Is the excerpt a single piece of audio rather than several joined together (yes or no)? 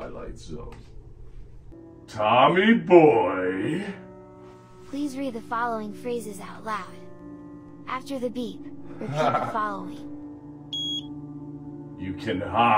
no